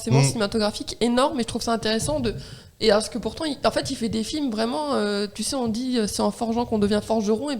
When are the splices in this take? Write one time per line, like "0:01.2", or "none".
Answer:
none